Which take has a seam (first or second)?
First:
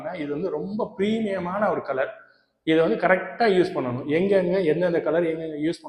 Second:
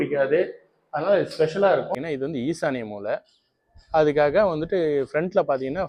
second